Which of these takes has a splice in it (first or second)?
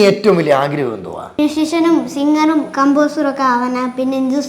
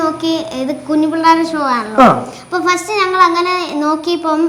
first